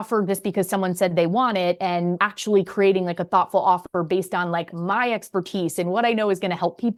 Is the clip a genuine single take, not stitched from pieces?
yes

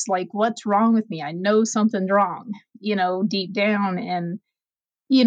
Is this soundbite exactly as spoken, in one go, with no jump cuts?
yes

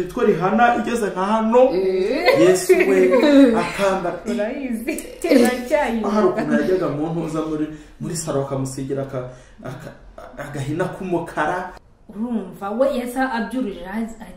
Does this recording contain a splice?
yes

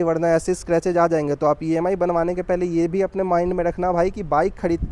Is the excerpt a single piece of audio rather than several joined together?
yes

